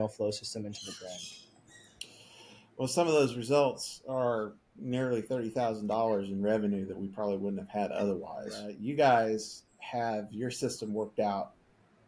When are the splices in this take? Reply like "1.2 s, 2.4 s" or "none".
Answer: 8.7 s